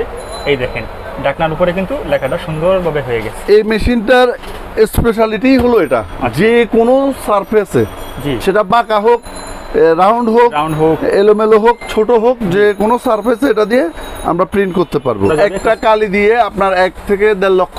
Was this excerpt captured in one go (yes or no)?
no